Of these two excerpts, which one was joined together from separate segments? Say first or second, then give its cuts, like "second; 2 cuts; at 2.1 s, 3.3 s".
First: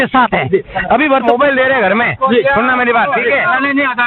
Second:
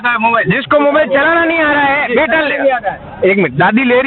first; 1 cut; at 1.2 s